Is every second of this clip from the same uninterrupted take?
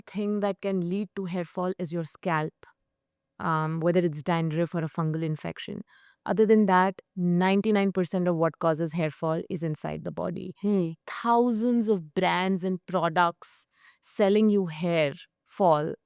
no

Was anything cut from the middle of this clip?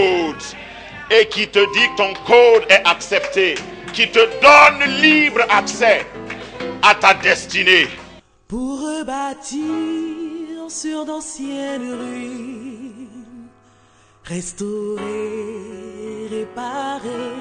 yes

